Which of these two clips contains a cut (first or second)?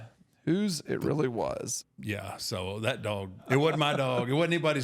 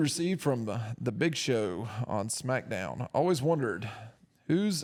first